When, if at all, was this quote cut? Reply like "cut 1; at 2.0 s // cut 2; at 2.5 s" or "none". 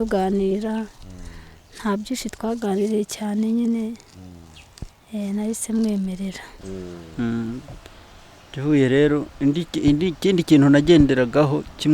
cut 1; at 6.6 s